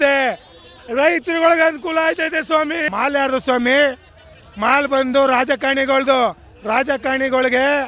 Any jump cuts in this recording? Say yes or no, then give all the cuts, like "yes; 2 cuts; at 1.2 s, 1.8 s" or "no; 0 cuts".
yes; 1 cut; at 2.9 s